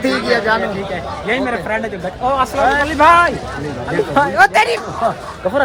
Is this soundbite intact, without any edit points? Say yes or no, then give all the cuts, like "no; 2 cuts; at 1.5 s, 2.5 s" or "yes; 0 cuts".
yes; 0 cuts